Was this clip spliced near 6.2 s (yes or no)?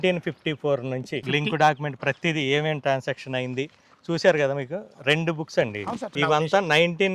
yes